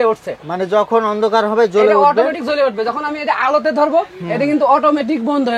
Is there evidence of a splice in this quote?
no; 0 cuts

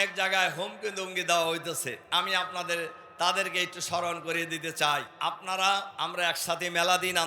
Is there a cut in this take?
yes; 3 cuts; at 2.0 s, 5.1 s, 5.9 s

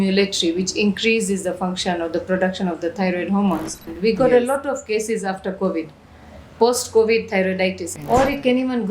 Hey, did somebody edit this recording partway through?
yes; 2 cuts; at 3.9 s, 7.9 s

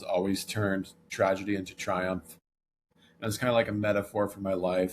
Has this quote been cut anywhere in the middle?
yes; 2 cuts; at 1.1 s, 2.9 s

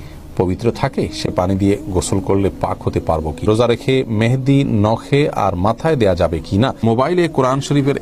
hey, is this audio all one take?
no; 2 cuts; at 3.4 s, 6.8 s

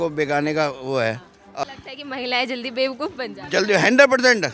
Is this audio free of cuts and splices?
no; 1 cut; at 1.7 s

